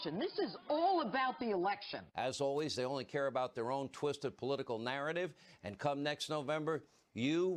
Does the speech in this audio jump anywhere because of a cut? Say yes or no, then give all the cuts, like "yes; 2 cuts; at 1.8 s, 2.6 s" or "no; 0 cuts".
yes; 1 cut; at 2.0 s